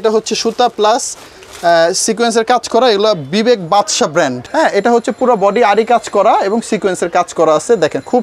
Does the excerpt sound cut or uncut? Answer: cut